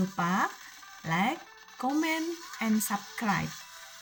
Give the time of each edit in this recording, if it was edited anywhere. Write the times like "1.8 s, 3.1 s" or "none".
none